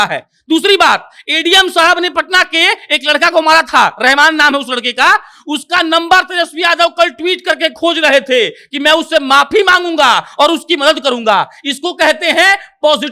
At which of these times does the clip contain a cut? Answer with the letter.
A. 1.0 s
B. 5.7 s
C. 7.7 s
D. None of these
D